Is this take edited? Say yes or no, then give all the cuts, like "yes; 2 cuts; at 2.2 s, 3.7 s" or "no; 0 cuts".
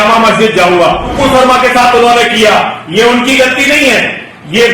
yes; 1 cut; at 1.2 s